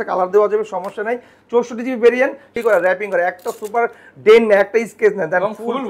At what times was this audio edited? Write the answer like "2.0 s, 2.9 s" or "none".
2.6 s